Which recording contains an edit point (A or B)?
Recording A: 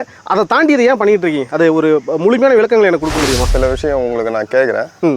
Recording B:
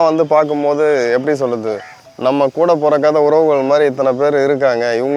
A